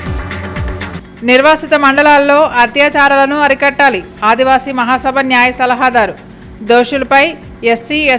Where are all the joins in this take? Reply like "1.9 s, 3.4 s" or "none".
0.9 s